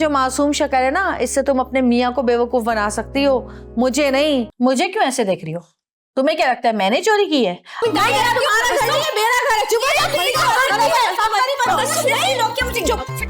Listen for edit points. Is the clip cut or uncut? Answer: cut